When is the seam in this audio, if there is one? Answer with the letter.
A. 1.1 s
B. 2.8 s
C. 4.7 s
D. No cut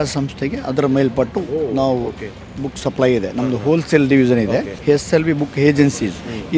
C